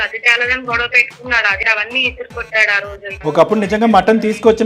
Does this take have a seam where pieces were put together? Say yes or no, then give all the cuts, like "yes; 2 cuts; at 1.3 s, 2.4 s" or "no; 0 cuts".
yes; 2 cuts; at 1.6 s, 3.2 s